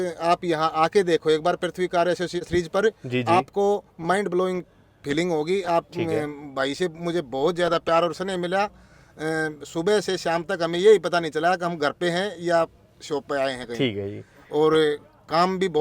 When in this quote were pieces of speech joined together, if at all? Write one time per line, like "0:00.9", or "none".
0:02.4